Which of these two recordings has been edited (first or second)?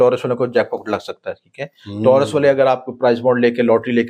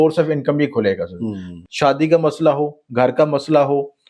second